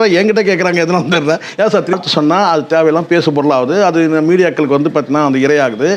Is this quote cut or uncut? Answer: uncut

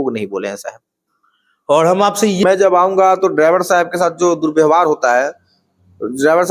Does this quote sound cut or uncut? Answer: cut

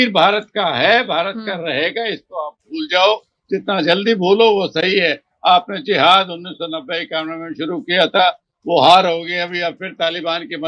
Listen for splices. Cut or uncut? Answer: uncut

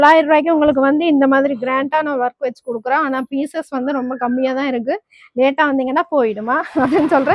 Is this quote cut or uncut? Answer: uncut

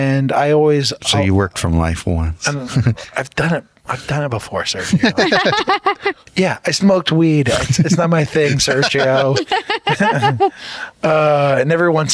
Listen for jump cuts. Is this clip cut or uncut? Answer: cut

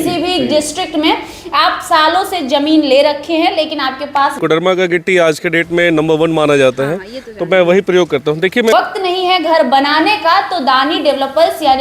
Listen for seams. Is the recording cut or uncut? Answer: cut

